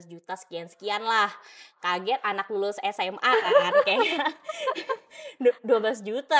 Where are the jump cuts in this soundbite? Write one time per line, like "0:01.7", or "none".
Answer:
none